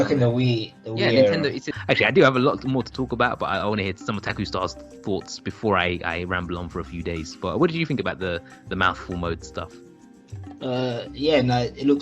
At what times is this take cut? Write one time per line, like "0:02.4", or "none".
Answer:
0:01.7
0:04.3